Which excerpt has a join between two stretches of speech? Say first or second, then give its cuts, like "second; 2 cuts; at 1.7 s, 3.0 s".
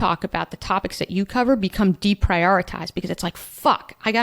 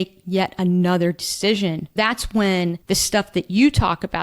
second; 2 cuts; at 1.9 s, 2.8 s